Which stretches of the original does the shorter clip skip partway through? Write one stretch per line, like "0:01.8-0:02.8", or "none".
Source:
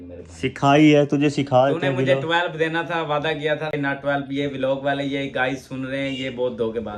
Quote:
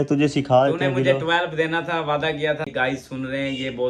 0:03.7-0:05.3